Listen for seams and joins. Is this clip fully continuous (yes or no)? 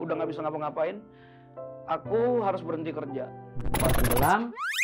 no